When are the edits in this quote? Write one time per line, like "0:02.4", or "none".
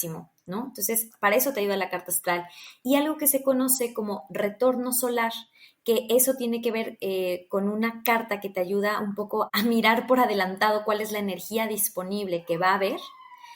0:09.5